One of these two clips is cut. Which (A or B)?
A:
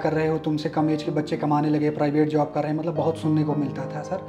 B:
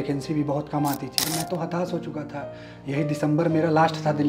B